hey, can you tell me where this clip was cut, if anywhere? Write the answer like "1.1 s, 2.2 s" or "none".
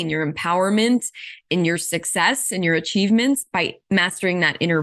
3.8 s